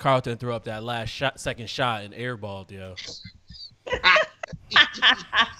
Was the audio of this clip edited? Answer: no; 0 cuts

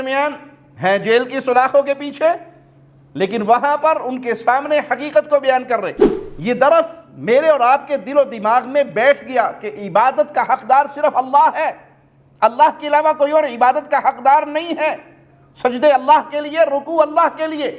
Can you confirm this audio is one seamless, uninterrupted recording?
no; 1 cut; at 6.0 s

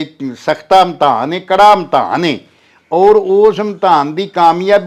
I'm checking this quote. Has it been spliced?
no; 0 cuts

